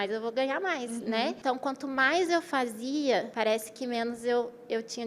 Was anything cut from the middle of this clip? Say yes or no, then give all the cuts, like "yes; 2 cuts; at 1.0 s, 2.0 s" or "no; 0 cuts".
yes; 2 cuts; at 1.4 s, 3.3 s